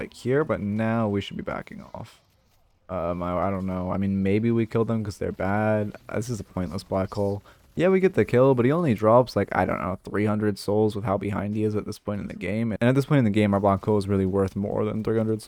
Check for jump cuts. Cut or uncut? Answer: uncut